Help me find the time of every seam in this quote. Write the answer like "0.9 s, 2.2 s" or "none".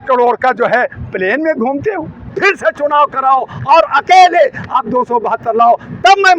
2.3 s